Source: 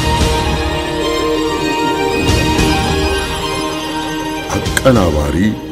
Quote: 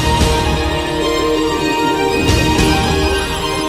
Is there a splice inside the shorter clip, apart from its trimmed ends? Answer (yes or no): no